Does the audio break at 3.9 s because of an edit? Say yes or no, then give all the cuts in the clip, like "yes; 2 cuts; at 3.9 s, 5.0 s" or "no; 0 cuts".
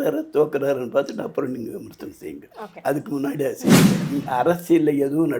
yes; 1 cut; at 3.9 s